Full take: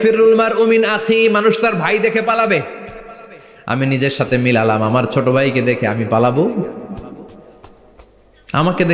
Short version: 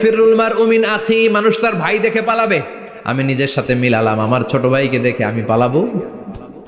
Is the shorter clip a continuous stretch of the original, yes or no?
no